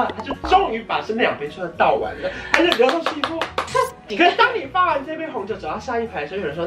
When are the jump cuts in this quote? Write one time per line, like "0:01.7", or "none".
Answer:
none